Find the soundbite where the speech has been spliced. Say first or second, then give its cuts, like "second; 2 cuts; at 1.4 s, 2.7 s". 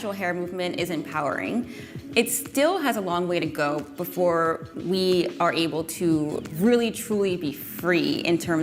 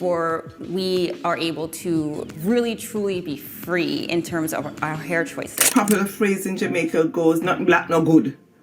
second; 1 cut; at 5.6 s